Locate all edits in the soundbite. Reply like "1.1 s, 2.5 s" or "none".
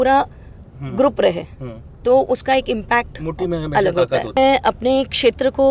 4.4 s